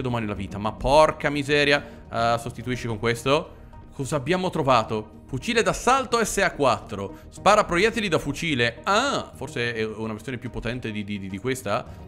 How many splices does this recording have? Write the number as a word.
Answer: zero